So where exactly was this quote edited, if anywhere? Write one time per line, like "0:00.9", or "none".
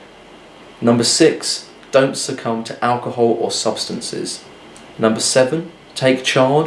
none

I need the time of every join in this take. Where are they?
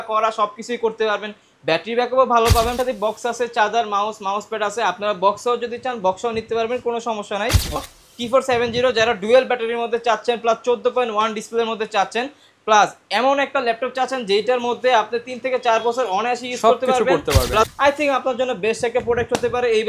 0:02.7
0:07.8
0:17.7

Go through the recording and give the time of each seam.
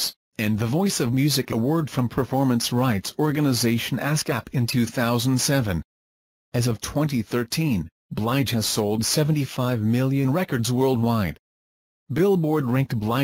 0:01.5

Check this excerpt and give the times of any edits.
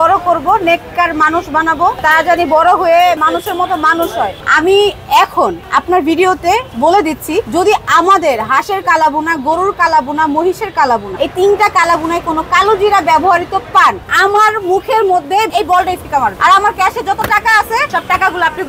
0:03.2
0:04.4
0:07.5
0:11.1
0:15.5
0:17.9

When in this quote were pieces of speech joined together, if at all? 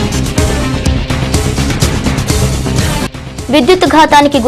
0:03.0

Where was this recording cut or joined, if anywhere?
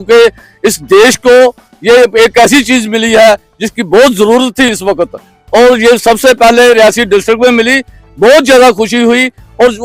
none

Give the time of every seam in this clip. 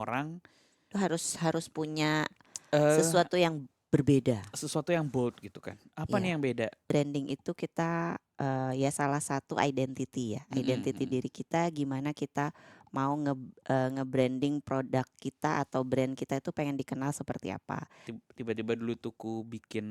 0:06.8
0:18.1

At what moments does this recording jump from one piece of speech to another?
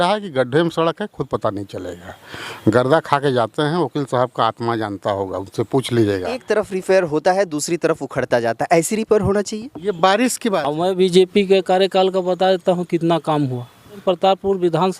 0:06.4
0:10.7
0:14.0

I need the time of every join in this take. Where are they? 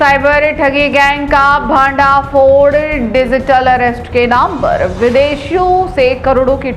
none

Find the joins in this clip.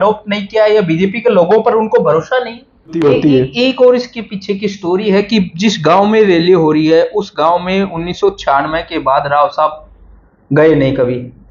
0:03.0

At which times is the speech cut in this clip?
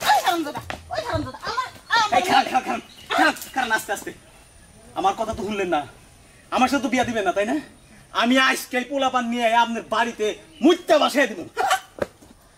none

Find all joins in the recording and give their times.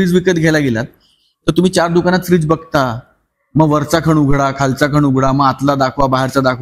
none

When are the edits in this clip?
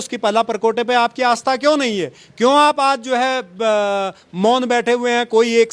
none

